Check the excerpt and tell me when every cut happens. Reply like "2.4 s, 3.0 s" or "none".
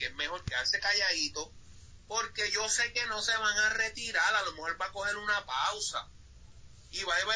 none